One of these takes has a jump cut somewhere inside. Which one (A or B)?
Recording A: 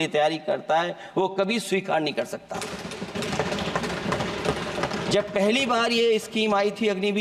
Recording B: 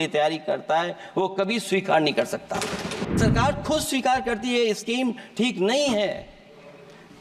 B